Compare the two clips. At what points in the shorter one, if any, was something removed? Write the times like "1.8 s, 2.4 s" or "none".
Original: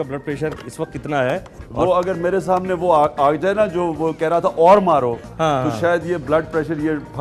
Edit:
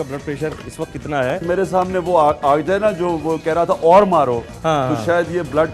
1.4 s

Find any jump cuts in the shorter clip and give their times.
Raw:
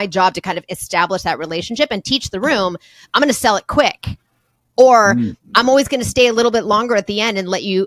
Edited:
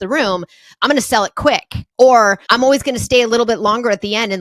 1.8 s, 2.4 s

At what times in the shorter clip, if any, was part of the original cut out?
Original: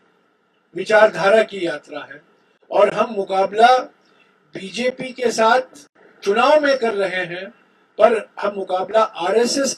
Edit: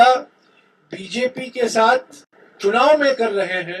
none

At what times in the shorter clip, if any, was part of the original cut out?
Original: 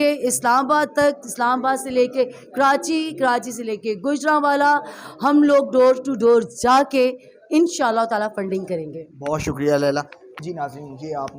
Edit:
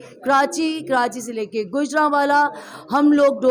none

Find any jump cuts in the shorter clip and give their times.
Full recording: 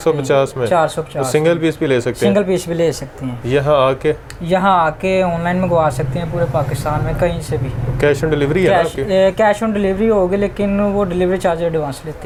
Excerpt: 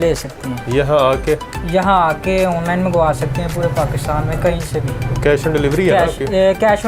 none

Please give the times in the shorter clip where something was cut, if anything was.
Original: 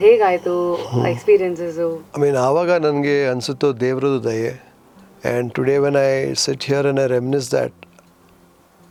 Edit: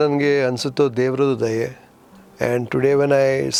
none

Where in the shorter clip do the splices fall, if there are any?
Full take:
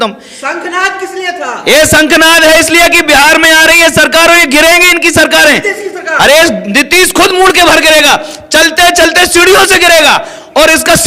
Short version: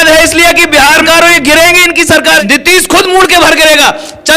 1.0 s, 2.4 s

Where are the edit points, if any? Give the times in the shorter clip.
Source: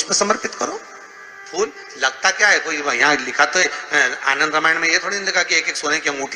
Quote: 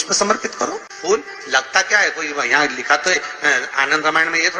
0.9 s

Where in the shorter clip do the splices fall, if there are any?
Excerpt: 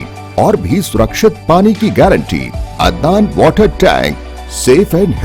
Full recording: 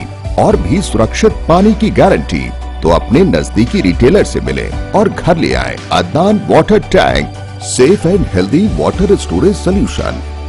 2.6 s

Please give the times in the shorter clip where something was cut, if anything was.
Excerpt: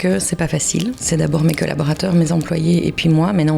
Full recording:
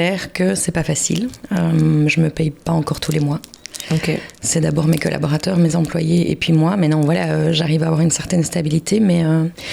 1.0 s

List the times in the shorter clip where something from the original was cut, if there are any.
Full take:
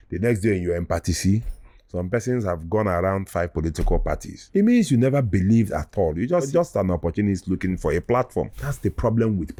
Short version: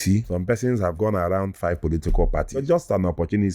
0.9 s, 2.6 s

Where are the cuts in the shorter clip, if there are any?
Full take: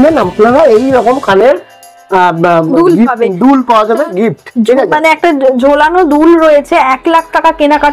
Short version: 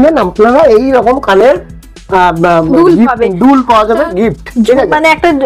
none

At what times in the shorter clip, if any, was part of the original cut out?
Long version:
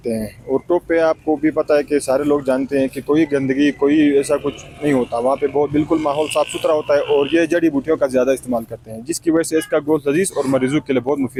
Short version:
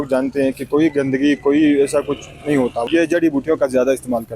2.9 s

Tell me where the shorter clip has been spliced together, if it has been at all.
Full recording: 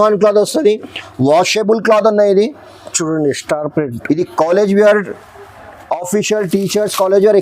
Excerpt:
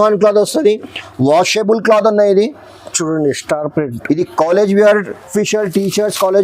5.3 s

